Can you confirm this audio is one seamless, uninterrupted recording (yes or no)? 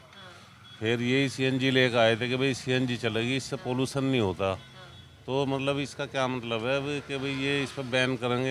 yes